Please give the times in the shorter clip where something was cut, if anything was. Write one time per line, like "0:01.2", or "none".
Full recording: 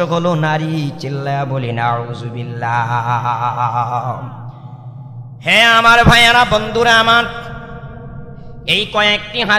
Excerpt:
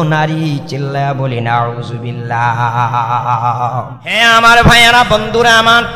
0:04.0